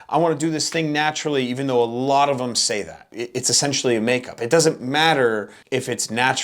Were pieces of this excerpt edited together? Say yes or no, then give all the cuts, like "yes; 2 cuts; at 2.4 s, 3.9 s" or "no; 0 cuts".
yes; 2 cuts; at 3.2 s, 5.6 s